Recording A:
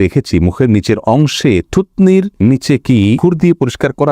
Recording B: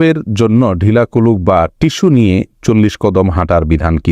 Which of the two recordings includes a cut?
A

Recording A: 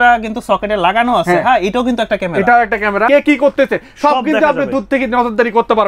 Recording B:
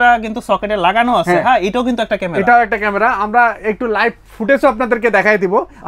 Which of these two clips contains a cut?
A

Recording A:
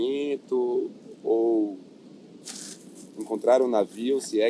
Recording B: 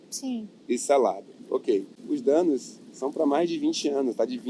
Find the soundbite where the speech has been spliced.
B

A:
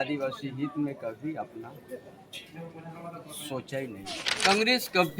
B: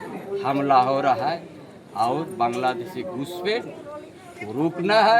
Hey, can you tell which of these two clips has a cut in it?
A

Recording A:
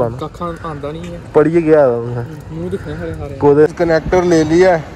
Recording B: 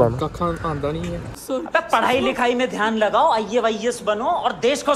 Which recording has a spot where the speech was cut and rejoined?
A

